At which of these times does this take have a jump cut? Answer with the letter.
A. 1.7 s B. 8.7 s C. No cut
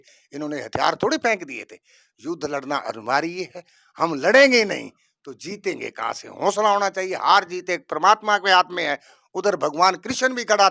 C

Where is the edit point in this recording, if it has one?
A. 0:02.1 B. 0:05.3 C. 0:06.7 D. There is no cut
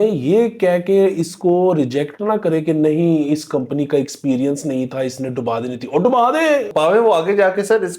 C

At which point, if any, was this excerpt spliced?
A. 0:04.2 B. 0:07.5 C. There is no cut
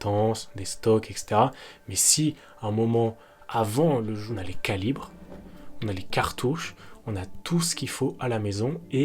A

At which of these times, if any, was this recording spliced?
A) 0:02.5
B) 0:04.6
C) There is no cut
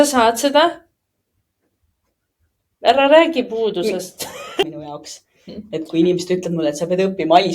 B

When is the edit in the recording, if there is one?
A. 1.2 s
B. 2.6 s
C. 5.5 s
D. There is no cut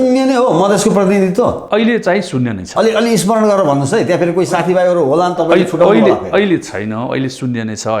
D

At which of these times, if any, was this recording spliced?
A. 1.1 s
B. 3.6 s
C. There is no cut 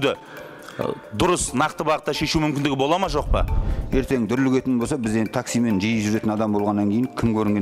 B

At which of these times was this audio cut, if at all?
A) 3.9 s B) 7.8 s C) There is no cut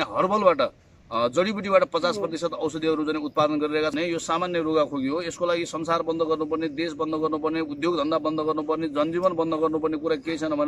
A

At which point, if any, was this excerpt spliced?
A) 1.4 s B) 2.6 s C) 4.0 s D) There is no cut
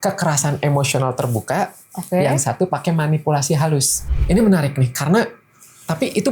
C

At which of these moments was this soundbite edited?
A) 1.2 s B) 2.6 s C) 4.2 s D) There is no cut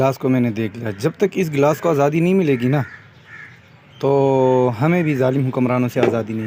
D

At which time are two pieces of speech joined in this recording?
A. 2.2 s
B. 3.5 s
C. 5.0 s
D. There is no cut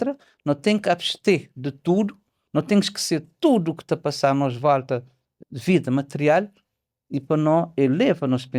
D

